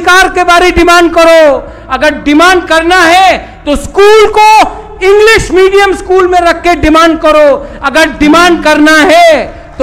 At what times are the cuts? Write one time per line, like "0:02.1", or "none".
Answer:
none